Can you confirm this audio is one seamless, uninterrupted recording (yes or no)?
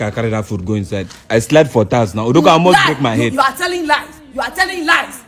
yes